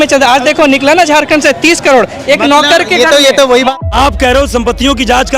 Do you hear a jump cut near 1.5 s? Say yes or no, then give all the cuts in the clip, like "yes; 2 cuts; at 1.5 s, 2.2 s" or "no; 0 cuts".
no; 1 cut; at 3.7 s